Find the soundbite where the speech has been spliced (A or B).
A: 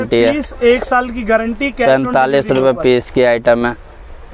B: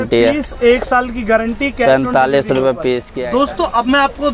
B